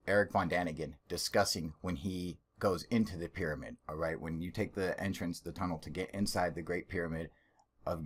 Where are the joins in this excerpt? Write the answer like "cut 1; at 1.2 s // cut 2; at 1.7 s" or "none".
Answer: none